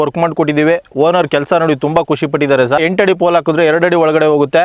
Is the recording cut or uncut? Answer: cut